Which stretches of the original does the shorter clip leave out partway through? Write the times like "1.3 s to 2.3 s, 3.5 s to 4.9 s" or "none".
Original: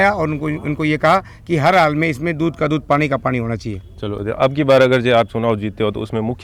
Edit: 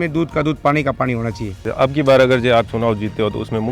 3.9 s to 4.2 s